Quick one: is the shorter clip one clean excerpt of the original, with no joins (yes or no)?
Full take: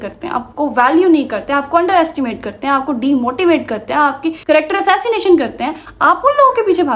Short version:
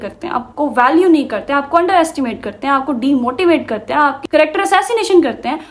no